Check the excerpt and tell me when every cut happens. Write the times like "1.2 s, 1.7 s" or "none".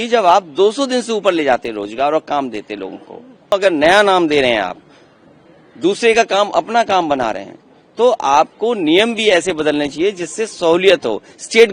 3.5 s